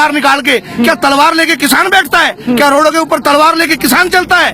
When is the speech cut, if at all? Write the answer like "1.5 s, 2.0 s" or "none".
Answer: none